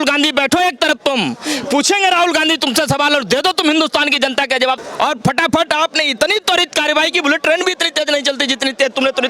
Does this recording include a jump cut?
yes; 1 cut; at 4.9 s

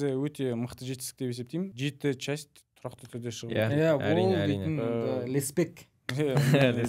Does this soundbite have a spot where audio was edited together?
yes; 1 cut; at 1.7 s

